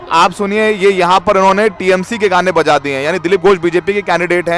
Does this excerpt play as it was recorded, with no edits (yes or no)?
yes